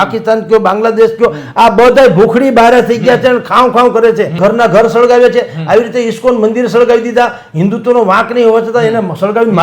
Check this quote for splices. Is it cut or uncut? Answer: cut